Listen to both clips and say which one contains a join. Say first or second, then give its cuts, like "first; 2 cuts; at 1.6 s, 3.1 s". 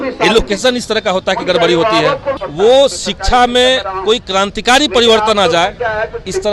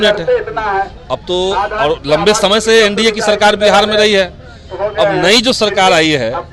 first; 1 cut; at 2.4 s